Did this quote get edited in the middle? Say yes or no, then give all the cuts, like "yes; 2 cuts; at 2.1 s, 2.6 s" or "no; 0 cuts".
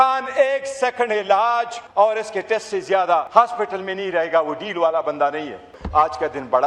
yes; 3 cuts; at 1.8 s, 3.3 s, 5.8 s